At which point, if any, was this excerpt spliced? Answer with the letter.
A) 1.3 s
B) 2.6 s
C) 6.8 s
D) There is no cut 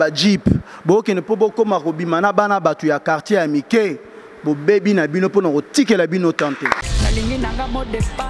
C